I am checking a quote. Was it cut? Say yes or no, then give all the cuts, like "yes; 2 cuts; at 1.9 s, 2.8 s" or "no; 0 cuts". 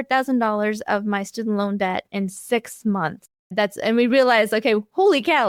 no; 0 cuts